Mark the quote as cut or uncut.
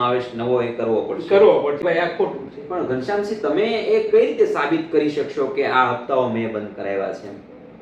cut